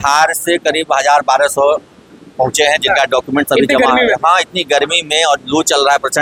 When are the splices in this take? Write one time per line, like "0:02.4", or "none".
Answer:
none